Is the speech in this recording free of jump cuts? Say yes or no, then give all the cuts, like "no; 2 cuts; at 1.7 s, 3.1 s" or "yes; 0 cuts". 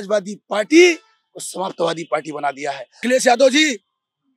no; 1 cut; at 3.0 s